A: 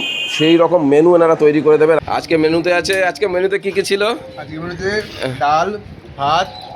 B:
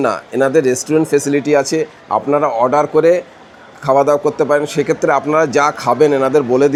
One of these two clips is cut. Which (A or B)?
A